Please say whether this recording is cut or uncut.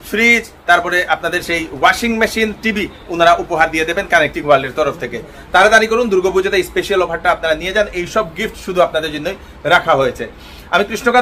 uncut